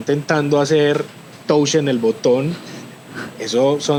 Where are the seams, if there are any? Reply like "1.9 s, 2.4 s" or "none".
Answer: none